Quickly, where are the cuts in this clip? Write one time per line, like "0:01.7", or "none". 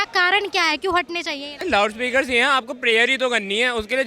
0:01.5